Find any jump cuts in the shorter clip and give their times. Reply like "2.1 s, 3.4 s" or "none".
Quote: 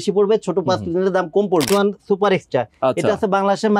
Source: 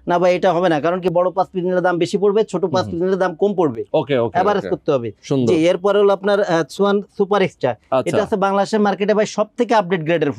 1.7 s